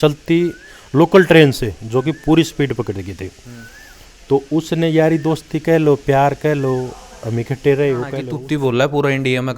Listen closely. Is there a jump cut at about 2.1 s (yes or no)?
no